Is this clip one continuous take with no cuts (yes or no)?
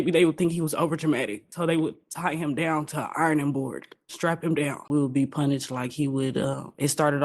no